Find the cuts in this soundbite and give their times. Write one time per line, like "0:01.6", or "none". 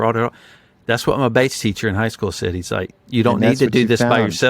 0:02.9